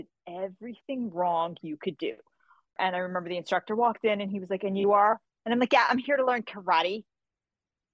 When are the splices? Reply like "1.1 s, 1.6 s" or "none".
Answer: 2.8 s